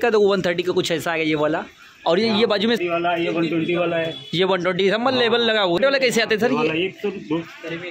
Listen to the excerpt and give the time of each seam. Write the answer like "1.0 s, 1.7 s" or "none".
2.8 s, 5.8 s